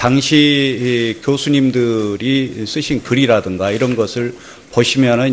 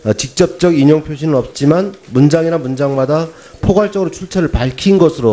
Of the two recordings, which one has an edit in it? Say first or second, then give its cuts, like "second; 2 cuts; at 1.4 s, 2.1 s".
first; 1 cut; at 1.9 s